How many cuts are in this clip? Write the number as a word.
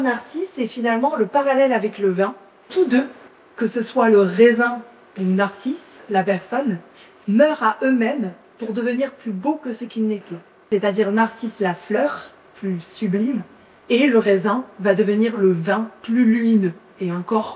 two